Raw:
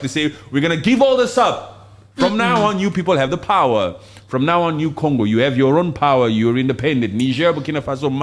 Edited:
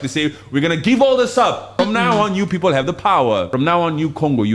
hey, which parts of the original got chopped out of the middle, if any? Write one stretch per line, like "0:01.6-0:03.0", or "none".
0:01.7-0:02.1
0:03.9-0:04.3